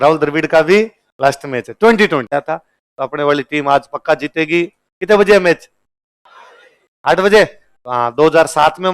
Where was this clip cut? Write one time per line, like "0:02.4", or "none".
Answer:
0:02.3